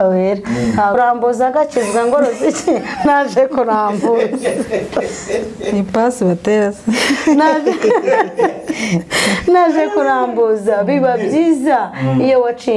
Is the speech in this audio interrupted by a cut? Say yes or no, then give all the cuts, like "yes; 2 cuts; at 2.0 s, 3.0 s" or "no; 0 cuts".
yes; 1 cut; at 0.9 s